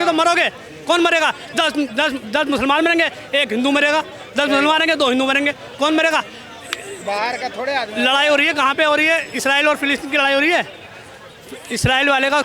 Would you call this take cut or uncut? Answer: uncut